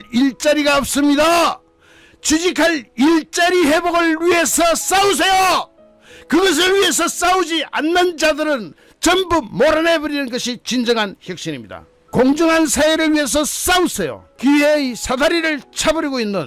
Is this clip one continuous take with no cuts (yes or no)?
yes